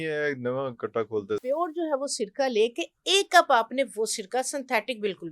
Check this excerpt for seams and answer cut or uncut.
cut